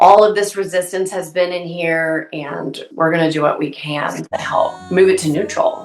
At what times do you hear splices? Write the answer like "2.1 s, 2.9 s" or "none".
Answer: 2.8 s, 4.8 s